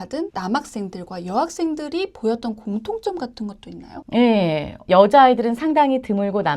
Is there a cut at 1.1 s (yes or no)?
no